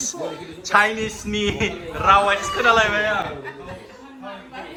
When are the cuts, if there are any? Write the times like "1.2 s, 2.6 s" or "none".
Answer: none